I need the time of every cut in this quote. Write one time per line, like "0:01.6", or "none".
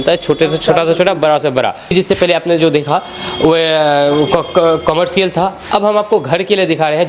none